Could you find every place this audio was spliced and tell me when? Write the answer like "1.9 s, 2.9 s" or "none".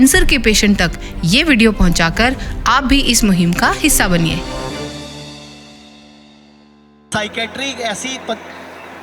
7.1 s

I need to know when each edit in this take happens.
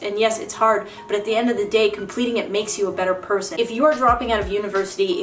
3.5 s

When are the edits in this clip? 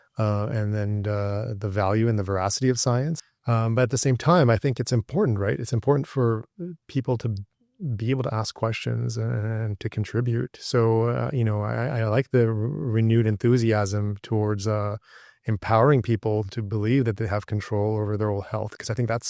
3.3 s

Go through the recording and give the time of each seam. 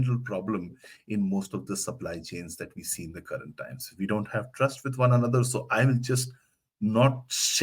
none

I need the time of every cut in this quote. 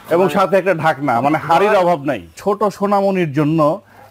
2.3 s

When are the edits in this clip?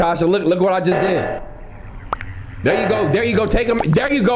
1.4 s

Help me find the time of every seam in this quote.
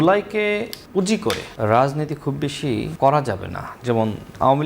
1.2 s, 2.9 s

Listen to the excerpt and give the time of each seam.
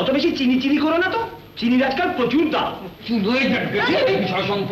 3.0 s

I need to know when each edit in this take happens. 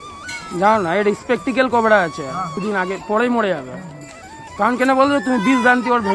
2.5 s

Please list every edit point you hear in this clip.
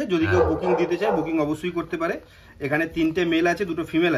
none

